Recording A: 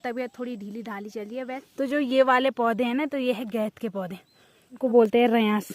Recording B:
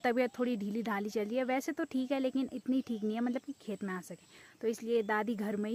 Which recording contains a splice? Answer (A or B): A